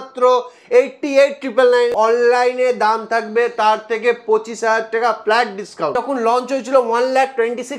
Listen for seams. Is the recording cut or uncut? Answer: cut